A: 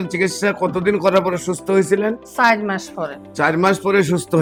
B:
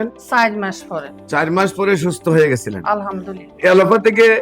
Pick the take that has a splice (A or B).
B